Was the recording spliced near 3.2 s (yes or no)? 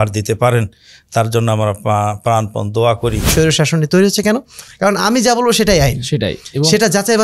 yes